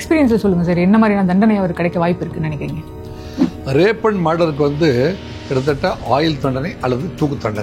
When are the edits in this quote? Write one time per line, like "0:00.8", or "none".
none